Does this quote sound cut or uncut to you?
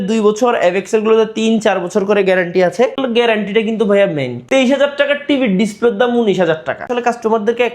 cut